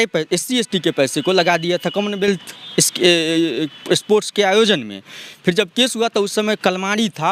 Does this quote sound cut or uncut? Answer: uncut